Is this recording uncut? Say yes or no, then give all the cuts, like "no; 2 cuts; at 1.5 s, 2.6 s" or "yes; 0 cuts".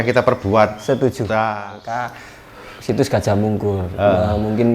no; 1 cut; at 1.6 s